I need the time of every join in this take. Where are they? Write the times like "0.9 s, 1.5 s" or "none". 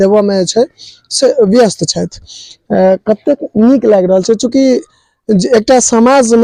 none